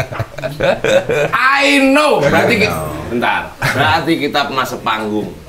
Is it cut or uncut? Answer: uncut